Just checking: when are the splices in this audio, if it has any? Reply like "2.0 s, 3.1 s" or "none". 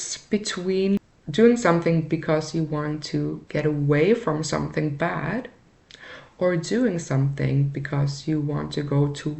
1.2 s, 3.4 s